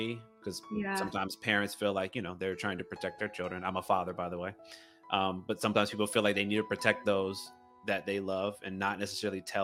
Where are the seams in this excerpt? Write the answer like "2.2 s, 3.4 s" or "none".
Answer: none